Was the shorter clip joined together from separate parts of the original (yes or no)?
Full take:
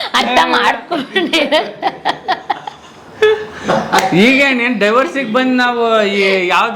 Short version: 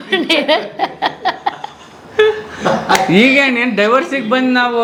no